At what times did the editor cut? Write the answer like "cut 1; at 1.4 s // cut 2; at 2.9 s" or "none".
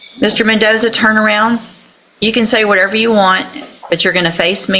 none